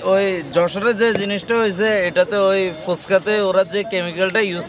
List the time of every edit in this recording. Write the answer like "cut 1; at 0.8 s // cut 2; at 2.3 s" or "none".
none